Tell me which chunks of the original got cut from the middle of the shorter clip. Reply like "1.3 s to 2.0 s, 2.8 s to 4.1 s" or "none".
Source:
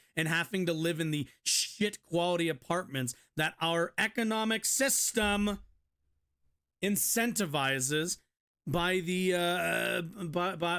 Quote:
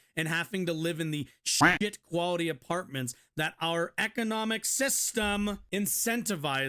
5.6 s to 6.7 s